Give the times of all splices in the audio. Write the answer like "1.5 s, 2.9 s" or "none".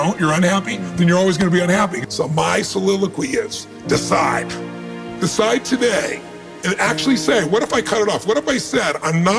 2.0 s